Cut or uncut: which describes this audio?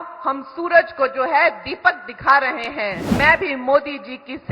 cut